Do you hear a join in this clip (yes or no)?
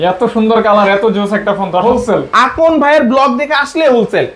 yes